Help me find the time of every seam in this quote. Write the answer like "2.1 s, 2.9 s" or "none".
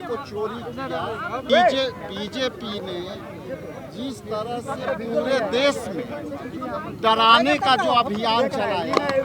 1.5 s